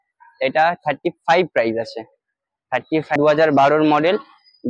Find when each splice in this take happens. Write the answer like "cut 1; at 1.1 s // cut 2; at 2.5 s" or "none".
cut 1; at 3.2 s